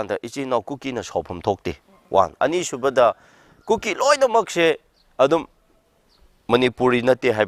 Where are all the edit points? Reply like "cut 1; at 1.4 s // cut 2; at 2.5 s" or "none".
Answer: none